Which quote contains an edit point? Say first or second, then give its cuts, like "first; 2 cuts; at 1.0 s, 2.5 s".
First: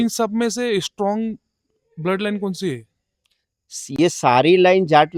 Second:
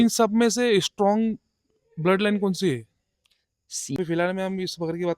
second; 1 cut; at 4.0 s